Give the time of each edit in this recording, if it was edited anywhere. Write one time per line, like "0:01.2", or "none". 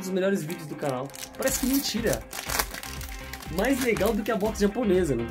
none